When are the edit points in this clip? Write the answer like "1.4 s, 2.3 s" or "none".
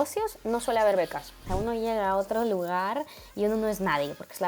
1.4 s